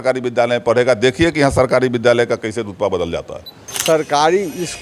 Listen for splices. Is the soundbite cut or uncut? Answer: cut